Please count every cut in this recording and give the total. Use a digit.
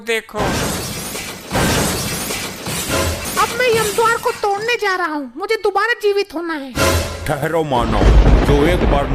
1